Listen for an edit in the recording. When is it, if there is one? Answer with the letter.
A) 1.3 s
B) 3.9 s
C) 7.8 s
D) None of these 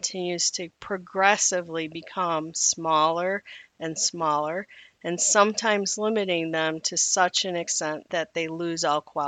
C